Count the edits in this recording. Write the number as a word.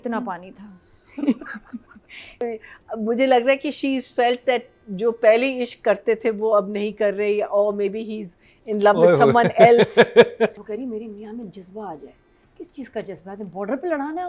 two